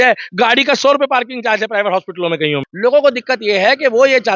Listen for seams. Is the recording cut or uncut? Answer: cut